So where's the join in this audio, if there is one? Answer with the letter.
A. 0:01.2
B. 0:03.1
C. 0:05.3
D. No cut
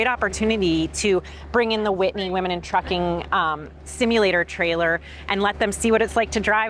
D